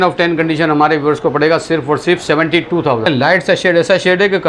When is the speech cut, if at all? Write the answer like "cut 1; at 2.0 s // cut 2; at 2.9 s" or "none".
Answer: cut 1; at 3.1 s